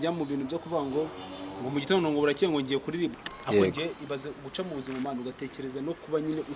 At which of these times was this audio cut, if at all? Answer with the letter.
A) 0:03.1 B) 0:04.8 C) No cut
A